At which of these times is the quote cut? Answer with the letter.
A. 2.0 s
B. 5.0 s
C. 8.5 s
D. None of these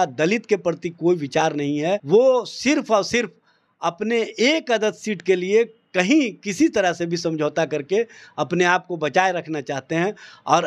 A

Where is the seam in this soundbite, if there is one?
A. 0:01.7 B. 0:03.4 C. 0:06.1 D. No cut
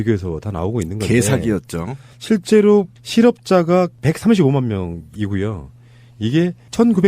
B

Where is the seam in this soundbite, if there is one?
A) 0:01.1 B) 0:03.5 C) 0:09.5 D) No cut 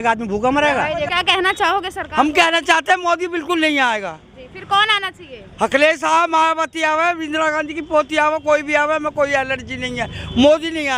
A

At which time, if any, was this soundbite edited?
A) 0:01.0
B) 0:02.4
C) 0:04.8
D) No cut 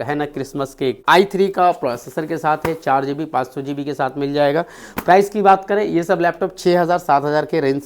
A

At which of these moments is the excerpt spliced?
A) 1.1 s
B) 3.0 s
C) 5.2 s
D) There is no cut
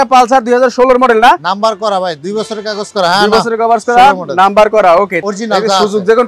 C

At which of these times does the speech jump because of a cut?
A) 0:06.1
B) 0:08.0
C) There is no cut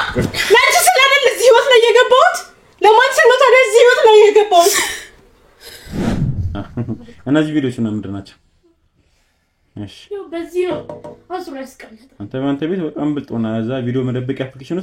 A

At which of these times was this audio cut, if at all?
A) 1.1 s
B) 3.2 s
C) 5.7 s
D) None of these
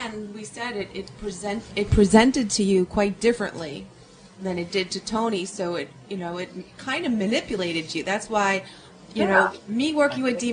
B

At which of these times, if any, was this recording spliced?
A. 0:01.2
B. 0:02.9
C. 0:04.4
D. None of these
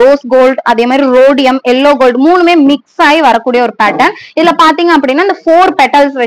D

